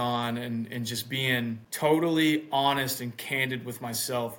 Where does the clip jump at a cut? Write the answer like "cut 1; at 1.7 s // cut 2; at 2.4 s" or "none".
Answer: cut 1; at 1.7 s